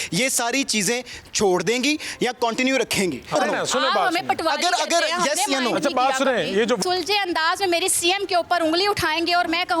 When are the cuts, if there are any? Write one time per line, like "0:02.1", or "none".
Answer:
0:03.3
0:06.8